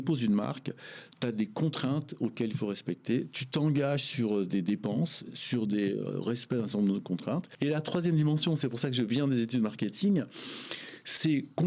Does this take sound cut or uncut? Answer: cut